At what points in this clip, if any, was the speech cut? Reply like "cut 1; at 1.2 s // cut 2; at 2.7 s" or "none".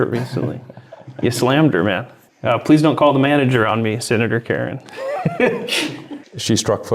none

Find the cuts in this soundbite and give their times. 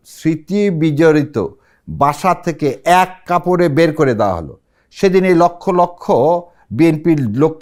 none

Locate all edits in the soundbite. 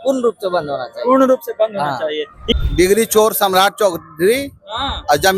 cut 1; at 2.4 s

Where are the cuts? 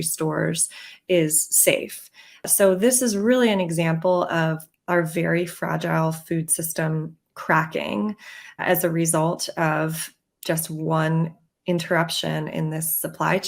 cut 1; at 2.4 s // cut 2; at 8.6 s

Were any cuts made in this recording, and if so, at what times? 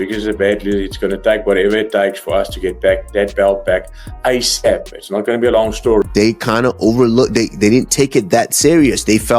cut 1; at 6.0 s

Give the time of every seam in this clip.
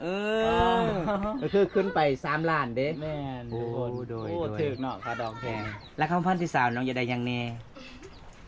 none

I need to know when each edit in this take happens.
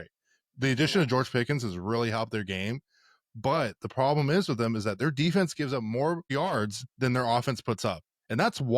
cut 1; at 6.3 s

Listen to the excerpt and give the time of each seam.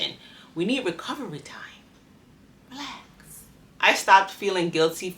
cut 1; at 3.6 s

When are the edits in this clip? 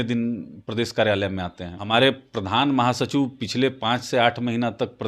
cut 1; at 1.7 s

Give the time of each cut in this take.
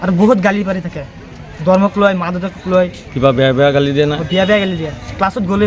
cut 1; at 3.0 s

